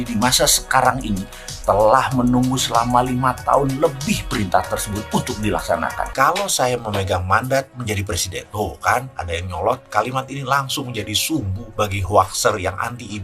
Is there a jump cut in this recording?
yes; 1 cut; at 6.1 s

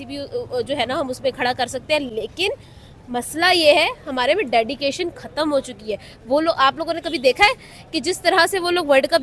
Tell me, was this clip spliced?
no; 0 cuts

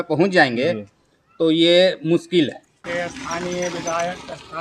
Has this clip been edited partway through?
yes; 1 cut; at 2.8 s

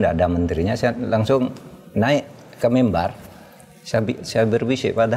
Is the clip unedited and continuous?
yes; 0 cuts

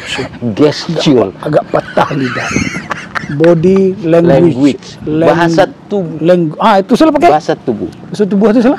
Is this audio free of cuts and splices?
yes; 0 cuts

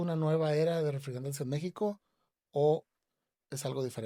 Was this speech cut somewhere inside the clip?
no; 0 cuts

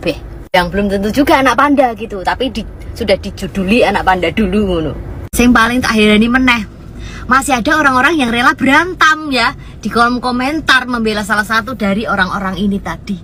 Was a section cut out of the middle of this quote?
no; 0 cuts

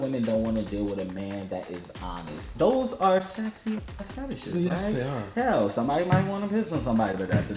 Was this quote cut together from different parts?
yes; 1 cut; at 2.5 s

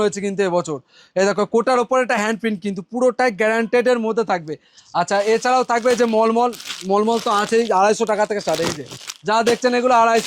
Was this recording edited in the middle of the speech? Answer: no; 0 cuts

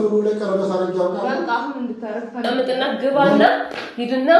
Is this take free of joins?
no; 1 cut; at 2.4 s

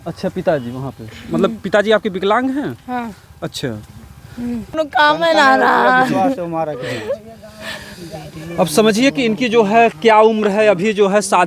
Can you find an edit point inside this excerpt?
yes; 1 cut; at 4.8 s

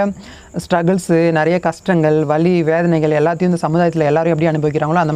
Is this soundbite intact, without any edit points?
yes; 0 cuts

